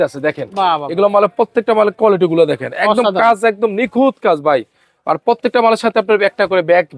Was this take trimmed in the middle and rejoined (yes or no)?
no